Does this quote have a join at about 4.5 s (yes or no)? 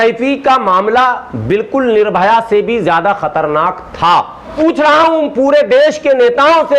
yes